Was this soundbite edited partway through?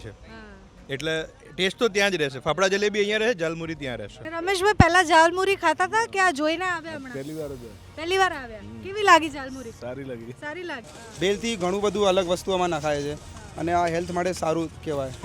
yes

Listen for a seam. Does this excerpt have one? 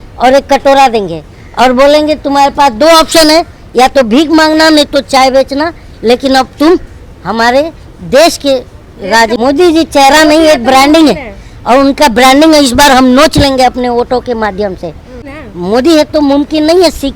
yes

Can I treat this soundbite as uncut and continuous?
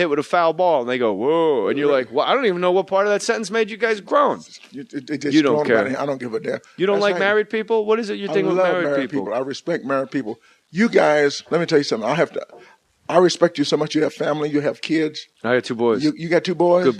yes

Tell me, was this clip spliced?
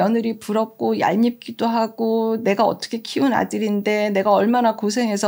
no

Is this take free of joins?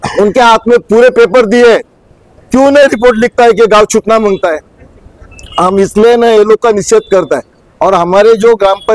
yes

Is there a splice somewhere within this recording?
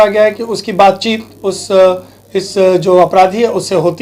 no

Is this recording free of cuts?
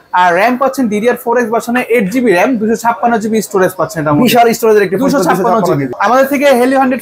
no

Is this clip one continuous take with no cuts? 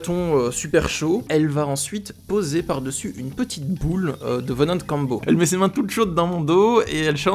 no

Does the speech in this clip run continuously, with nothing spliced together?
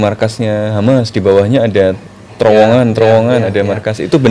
yes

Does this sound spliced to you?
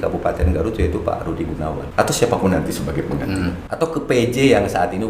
yes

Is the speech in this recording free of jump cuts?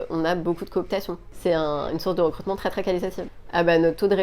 no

